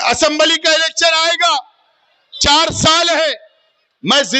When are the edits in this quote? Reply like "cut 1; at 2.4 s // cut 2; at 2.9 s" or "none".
none

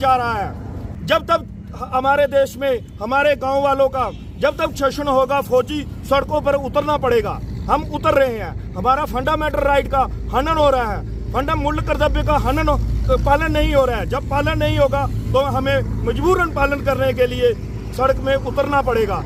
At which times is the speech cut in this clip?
none

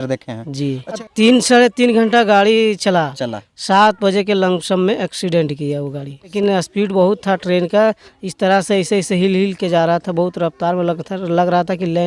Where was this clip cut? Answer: cut 1; at 1.1 s // cut 2; at 6.3 s

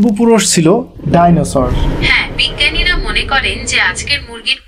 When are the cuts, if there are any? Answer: cut 1; at 1.9 s

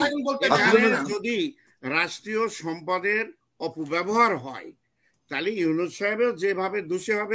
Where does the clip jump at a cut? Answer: none

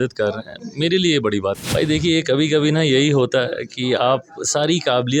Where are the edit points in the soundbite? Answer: cut 1; at 1.6 s

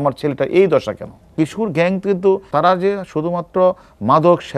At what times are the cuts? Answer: cut 1; at 1.3 s // cut 2; at 2.5 s

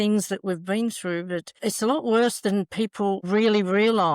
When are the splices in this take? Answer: cut 1; at 3.2 s

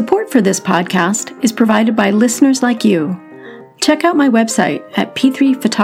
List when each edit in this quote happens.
none

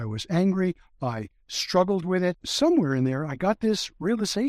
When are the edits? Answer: cut 1; at 2.5 s

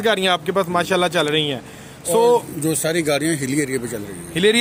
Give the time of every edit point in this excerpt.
none

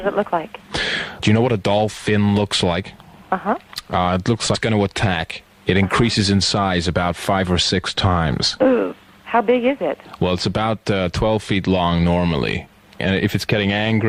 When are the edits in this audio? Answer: none

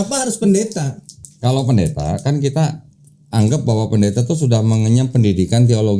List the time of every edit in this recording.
cut 1; at 1.3 s

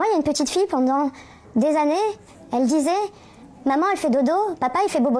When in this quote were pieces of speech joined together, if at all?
none

